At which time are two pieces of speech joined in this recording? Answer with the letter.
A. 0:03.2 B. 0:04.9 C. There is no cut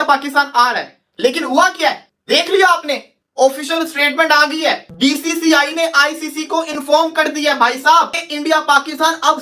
A